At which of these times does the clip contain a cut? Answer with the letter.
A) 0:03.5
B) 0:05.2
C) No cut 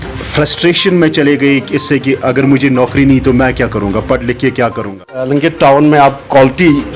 B